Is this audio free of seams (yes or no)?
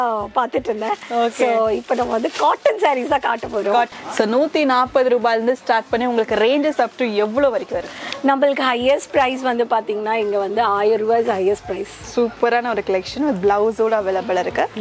no